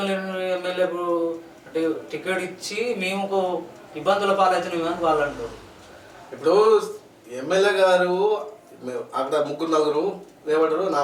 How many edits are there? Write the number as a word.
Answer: zero